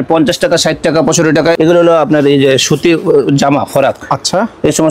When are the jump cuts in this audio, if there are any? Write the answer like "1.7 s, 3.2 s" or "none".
1.6 s